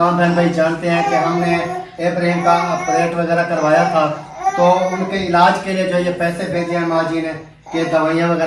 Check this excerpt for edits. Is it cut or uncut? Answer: uncut